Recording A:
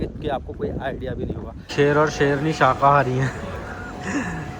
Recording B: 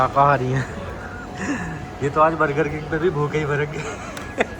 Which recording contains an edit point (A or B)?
A